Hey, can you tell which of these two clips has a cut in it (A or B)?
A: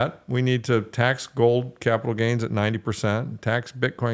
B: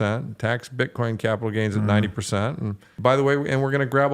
B